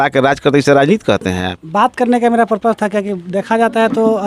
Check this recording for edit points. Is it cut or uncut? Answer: cut